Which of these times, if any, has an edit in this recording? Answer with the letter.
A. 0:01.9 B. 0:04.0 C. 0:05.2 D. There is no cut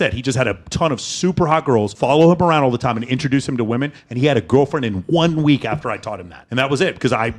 A